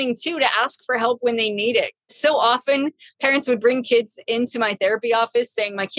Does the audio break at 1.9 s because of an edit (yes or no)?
yes